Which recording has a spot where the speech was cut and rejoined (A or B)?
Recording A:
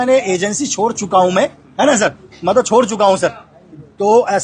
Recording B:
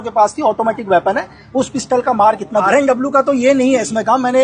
B